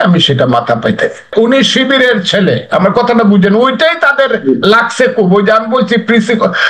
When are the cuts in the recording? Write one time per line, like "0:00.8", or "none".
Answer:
0:01.3